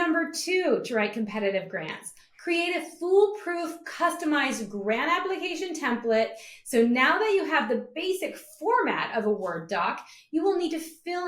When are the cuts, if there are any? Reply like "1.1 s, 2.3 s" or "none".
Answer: none

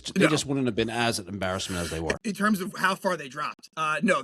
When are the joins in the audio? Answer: 2.2 s

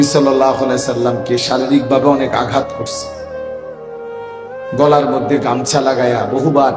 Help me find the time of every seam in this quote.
2.7 s, 4.5 s

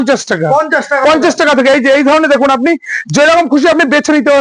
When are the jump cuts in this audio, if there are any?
none

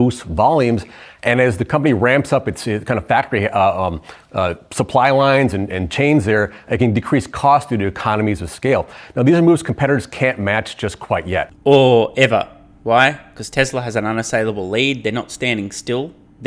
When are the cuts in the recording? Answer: none

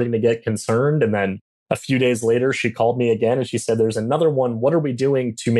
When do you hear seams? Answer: none

